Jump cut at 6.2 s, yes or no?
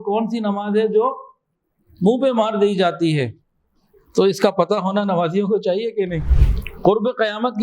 yes